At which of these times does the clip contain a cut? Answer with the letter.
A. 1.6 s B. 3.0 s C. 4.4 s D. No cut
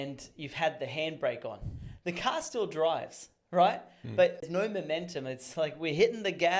C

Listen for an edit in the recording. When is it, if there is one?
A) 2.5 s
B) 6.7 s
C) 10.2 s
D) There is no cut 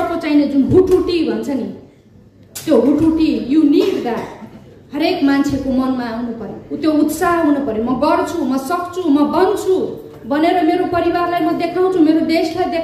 D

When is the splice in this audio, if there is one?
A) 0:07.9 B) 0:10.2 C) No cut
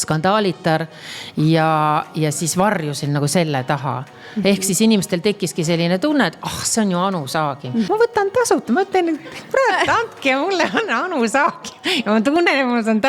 A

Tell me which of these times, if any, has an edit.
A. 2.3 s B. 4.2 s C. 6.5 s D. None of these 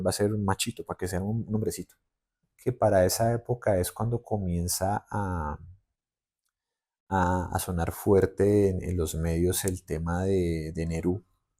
A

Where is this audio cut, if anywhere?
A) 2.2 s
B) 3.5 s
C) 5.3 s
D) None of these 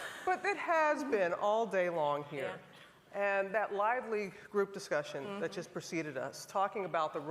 C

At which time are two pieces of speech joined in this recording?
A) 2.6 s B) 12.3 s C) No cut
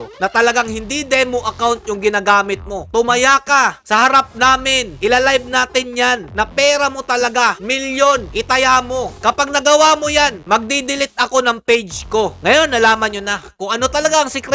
B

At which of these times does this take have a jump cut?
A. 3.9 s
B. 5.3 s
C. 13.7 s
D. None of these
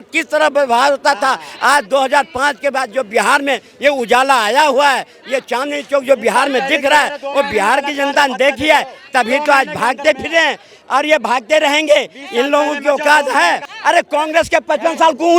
C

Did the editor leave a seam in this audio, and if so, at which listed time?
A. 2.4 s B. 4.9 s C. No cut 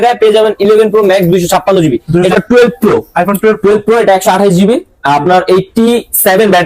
A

